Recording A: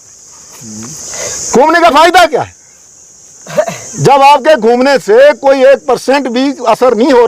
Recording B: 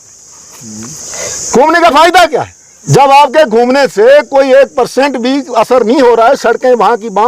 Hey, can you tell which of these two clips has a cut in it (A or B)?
B